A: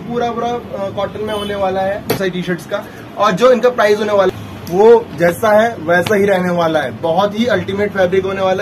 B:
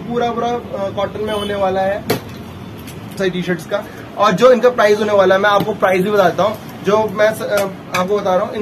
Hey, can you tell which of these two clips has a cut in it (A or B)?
A